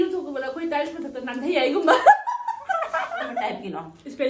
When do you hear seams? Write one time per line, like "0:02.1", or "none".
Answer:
0:03.3